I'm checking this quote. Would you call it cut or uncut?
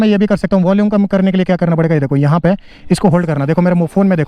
uncut